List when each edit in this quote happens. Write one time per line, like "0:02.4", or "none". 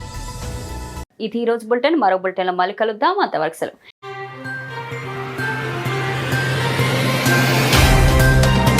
none